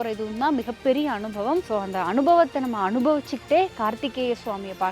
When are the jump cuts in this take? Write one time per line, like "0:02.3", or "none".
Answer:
0:01.7